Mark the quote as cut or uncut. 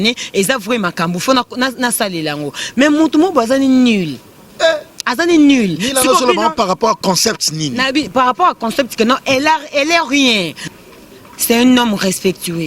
cut